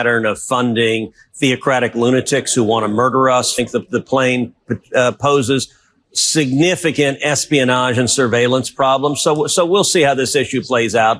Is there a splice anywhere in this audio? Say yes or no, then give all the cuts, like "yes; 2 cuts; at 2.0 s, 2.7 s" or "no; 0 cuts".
yes; 1 cut; at 3.6 s